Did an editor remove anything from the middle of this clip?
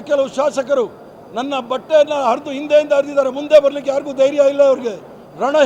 no; 0 cuts

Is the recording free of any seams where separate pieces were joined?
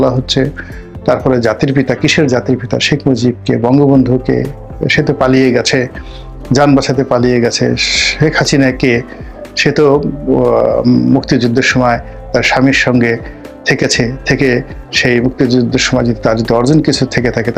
yes; 0 cuts

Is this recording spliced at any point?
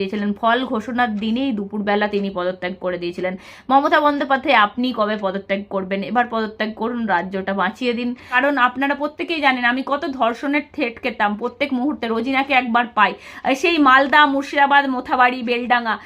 yes; 1 cut; at 8.3 s

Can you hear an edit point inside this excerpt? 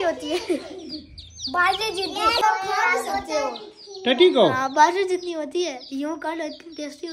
yes; 1 cut; at 2.4 s

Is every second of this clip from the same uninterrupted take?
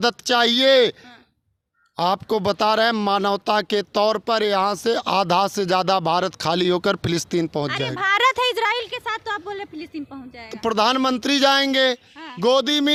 yes; 0 cuts

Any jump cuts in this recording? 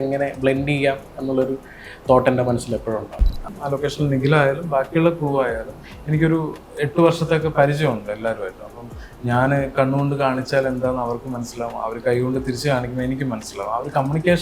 yes; 1 cut; at 3.5 s

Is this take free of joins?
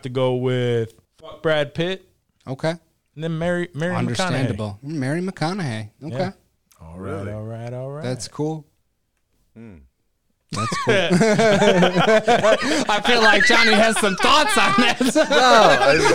no; 1 cut; at 1.4 s

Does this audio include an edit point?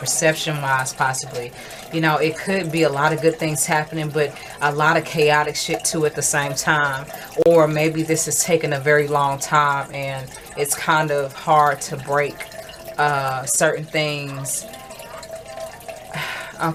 no; 0 cuts

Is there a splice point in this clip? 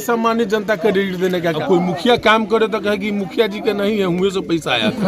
yes; 1 cut; at 1.5 s

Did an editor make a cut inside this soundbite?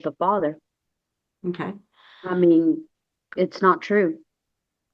no; 0 cuts

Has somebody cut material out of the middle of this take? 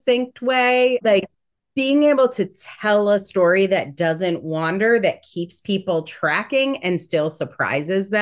yes; 1 cut; at 1.0 s

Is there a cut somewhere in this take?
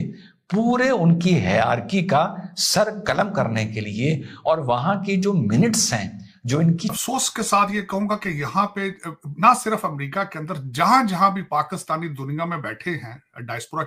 yes; 1 cut; at 7.0 s

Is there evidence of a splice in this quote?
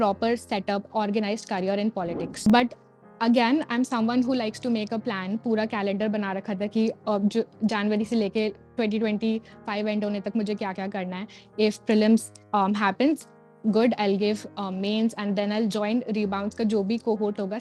yes; 1 cut; at 2.3 s

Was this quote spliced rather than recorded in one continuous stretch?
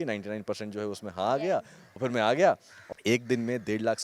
yes; 2 cuts; at 1.8 s, 2.9 s

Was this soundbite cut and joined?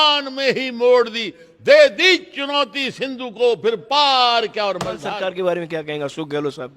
yes; 1 cut; at 5.0 s

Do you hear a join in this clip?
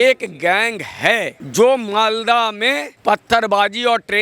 yes; 2 cuts; at 1.4 s, 2.9 s

